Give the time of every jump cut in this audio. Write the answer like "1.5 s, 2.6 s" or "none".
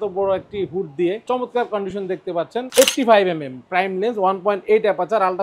1.2 s, 2.7 s